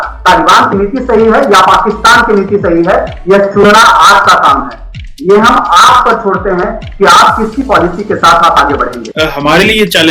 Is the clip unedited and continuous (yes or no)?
no